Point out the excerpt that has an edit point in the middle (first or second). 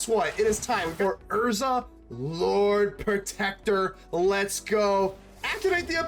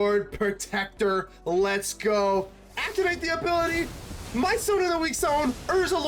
first